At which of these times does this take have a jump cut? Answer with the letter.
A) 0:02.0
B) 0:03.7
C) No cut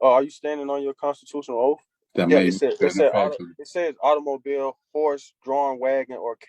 A